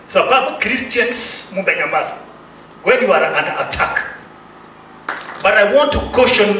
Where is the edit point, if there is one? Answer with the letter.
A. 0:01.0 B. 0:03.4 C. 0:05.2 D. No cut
C